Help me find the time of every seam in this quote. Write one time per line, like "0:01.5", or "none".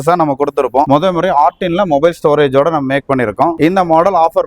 0:00.9
0:03.5